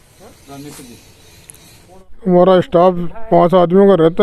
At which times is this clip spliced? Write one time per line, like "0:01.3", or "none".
0:02.0